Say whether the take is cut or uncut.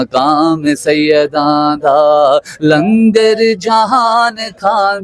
uncut